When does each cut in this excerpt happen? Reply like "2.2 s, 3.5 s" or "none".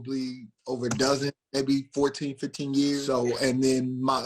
3.0 s